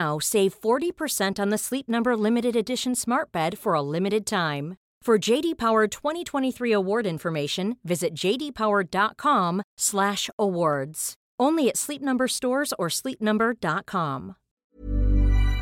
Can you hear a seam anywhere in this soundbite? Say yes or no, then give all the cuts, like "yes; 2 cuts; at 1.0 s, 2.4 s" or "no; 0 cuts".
yes; 1 cut; at 14.6 s